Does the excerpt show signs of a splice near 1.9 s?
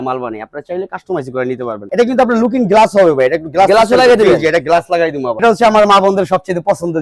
yes; 2 cuts; at 1.9 s, 5.4 s

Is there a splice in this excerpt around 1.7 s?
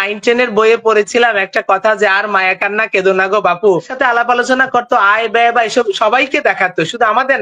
no; 1 cut; at 3.9 s

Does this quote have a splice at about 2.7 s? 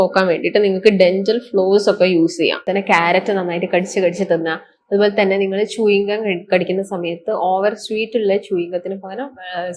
yes; 1 cut; at 2.7 s

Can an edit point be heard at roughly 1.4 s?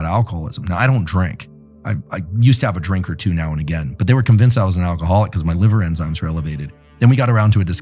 no; 0 cuts

